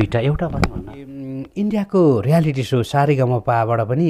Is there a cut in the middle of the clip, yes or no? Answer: yes